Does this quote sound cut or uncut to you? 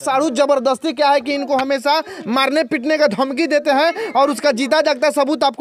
uncut